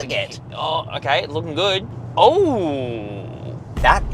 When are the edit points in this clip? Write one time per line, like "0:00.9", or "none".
0:02.0